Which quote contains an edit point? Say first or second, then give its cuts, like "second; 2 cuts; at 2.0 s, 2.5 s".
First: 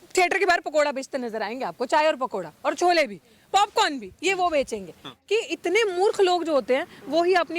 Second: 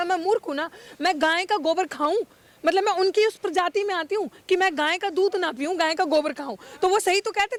first; 1 cut; at 5.1 s